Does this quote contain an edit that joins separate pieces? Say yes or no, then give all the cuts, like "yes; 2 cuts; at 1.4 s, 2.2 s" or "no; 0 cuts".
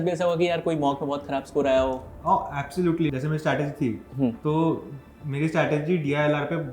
yes; 1 cut; at 3.1 s